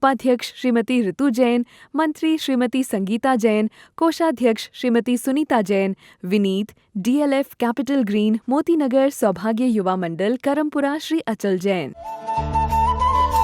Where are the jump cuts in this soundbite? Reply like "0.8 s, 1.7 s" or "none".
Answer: 12.2 s